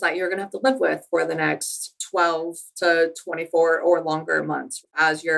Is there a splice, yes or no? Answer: no